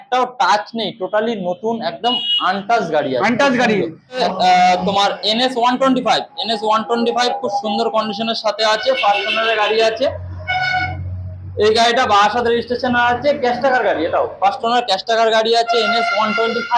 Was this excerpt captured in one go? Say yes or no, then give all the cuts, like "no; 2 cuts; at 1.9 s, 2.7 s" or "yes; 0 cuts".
no; 1 cut; at 4.2 s